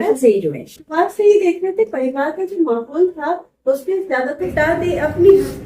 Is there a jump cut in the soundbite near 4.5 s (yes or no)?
yes